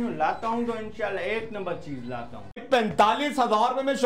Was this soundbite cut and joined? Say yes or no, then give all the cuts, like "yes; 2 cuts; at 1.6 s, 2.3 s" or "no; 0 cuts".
yes; 1 cut; at 2.6 s